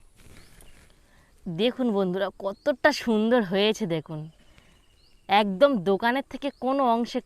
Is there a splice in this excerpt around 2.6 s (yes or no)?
no